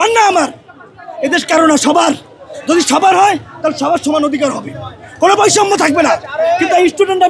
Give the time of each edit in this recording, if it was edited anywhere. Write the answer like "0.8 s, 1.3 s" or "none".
none